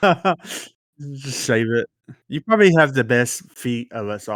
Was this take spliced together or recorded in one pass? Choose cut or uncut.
uncut